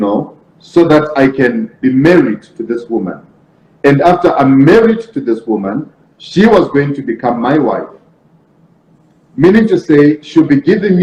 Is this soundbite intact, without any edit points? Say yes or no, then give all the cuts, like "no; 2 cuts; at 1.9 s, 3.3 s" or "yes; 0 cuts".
yes; 0 cuts